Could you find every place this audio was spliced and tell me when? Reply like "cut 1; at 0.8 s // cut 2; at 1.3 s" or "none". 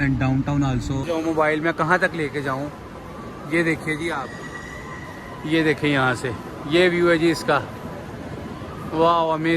cut 1; at 1.0 s